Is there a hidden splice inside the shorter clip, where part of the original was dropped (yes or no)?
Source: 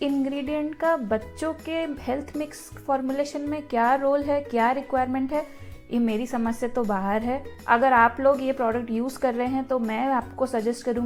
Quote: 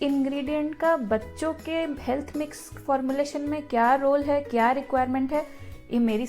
no